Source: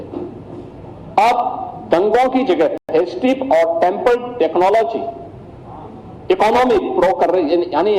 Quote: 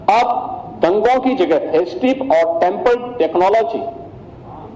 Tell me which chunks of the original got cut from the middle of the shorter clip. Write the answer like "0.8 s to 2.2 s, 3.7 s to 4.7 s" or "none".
2.8 s to 2.9 s